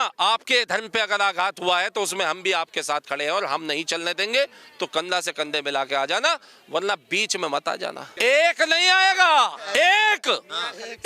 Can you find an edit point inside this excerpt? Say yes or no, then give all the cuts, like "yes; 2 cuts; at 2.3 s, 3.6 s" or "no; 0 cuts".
yes; 1 cut; at 8.1 s